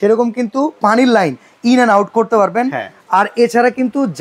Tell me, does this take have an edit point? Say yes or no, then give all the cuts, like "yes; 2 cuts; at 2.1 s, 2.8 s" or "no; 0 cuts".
no; 0 cuts